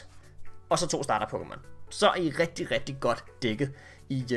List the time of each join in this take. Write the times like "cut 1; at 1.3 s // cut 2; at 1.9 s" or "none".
none